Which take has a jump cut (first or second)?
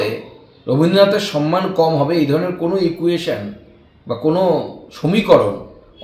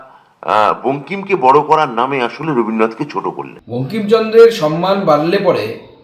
second